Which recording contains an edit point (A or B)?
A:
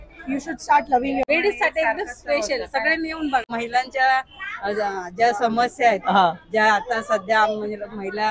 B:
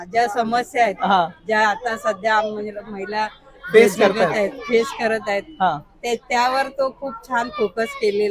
A